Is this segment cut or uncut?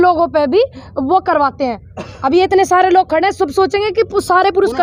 uncut